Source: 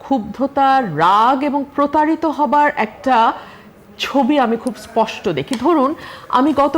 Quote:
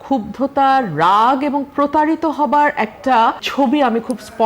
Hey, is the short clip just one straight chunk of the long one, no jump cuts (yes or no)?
no